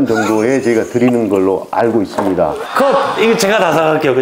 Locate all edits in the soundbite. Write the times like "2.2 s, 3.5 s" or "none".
2.6 s